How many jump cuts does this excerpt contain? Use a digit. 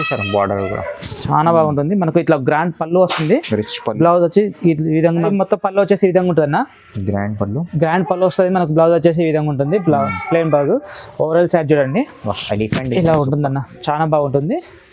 1